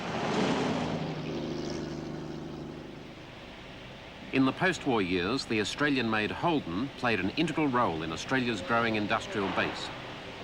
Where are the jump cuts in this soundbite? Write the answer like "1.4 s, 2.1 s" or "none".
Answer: 7.2 s